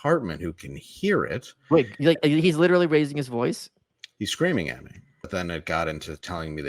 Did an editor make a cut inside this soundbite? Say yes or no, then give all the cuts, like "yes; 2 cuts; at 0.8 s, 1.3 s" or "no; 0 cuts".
yes; 1 cut; at 5.2 s